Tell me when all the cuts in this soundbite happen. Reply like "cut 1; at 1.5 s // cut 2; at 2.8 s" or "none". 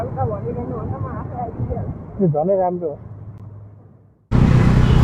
none